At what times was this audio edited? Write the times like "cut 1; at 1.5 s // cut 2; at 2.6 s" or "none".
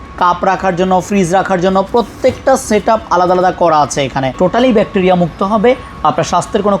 cut 1; at 4.3 s